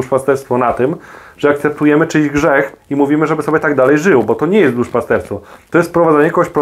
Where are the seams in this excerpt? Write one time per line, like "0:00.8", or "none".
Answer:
none